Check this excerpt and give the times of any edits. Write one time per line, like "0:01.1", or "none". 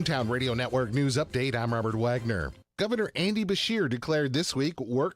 0:02.6